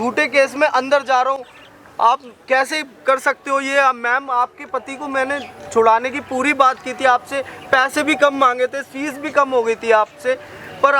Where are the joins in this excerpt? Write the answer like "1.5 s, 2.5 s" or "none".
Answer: none